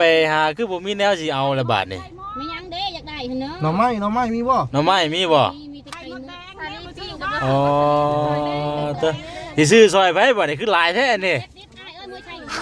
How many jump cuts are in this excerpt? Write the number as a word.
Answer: zero